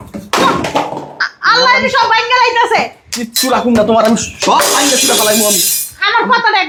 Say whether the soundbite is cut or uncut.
uncut